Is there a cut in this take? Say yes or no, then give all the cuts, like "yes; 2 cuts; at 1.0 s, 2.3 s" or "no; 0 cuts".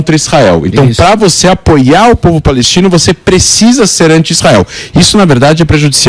no; 0 cuts